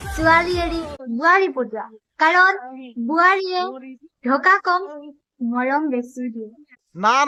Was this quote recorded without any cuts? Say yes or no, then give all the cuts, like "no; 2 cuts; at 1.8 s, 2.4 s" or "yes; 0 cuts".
yes; 0 cuts